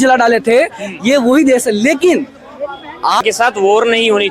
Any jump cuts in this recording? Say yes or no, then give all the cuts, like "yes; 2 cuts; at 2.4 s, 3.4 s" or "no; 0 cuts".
yes; 1 cut; at 3.2 s